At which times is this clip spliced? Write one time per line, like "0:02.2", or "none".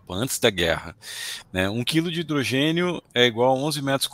none